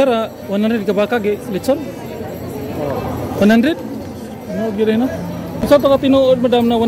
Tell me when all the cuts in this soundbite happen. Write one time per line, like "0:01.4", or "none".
0:05.5